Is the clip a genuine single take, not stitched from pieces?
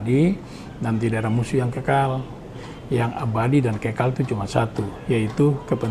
yes; 0 cuts

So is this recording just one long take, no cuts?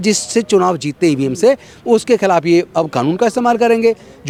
yes; 0 cuts

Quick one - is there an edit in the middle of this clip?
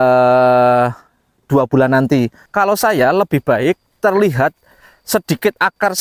yes; 1 cut; at 2.4 s

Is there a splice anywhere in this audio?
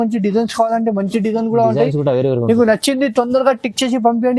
no; 0 cuts

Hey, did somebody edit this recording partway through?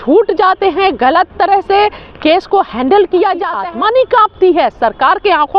yes; 1 cut; at 3.6 s

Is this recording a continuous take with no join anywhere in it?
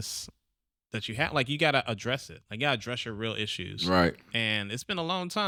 yes; 0 cuts

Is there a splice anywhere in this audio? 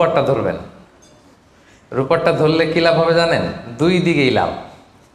no; 0 cuts

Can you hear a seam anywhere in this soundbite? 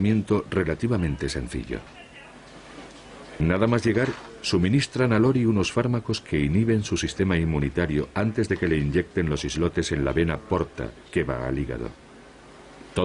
no; 0 cuts

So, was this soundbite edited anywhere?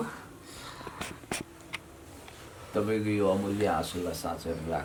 no; 0 cuts

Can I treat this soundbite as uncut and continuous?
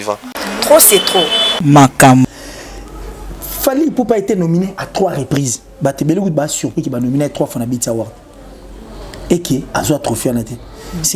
no; 1 cut; at 2.4 s

